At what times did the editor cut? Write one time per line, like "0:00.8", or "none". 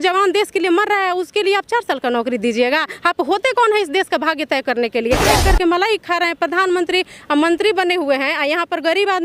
0:05.3